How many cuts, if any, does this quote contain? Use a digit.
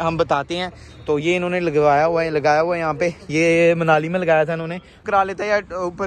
1